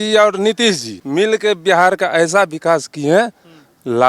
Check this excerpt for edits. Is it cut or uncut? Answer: cut